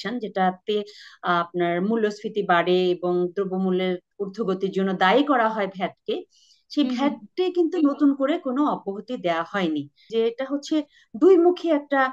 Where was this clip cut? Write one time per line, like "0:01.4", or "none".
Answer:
0:10.1